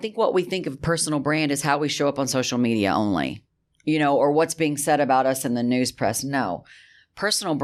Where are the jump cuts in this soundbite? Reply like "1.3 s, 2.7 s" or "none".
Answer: none